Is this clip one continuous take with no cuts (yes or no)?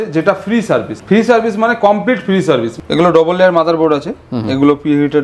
no